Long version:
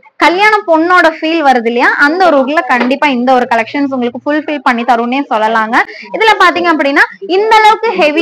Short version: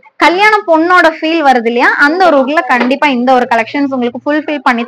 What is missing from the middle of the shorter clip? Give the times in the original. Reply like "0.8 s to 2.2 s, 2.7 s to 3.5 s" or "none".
none